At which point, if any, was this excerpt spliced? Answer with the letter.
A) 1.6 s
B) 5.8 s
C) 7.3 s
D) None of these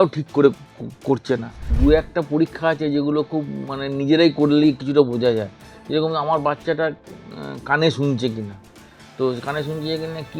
A